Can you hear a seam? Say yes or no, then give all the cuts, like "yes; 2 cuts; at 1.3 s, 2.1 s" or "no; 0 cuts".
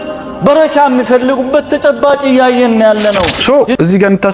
yes; 1 cut; at 3.3 s